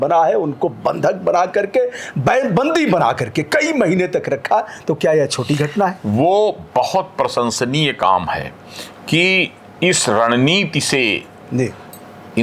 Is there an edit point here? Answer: no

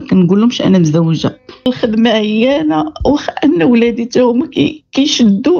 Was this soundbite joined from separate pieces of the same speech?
yes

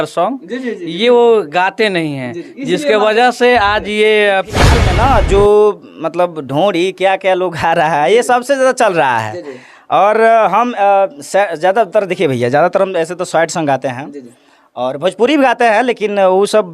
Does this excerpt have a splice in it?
yes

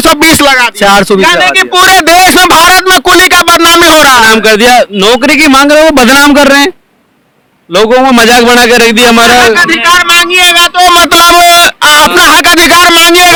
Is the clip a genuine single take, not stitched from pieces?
yes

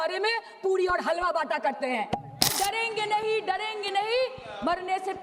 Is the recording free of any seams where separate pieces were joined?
no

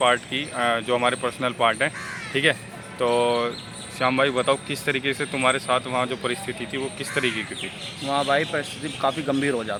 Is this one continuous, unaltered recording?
yes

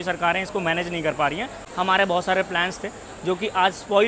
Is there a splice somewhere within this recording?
yes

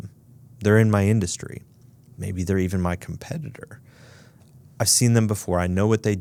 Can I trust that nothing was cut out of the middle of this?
yes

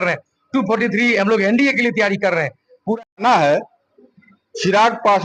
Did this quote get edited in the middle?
yes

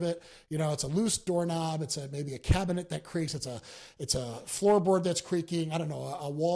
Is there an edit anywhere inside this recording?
no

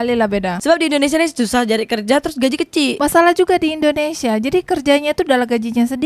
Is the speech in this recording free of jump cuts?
yes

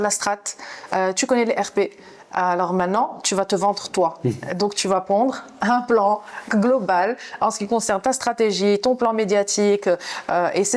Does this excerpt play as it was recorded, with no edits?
yes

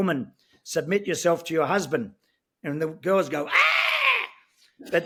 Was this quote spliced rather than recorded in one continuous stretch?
no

